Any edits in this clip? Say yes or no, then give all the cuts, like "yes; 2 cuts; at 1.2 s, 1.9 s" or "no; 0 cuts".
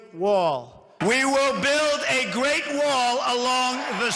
yes; 1 cut; at 2.4 s